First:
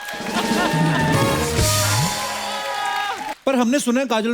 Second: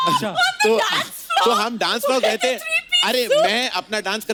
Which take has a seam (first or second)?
first